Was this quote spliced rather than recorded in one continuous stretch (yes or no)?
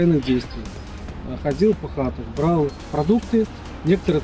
no